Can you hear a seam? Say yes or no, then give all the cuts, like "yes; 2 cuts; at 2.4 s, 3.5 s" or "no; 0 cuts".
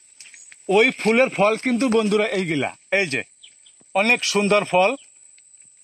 no; 0 cuts